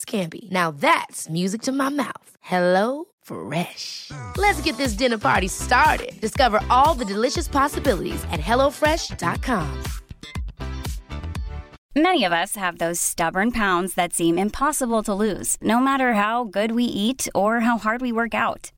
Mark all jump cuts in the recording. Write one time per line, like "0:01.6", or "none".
0:11.7